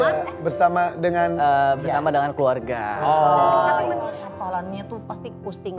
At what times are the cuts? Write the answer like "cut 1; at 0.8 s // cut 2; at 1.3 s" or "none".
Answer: cut 1; at 4.1 s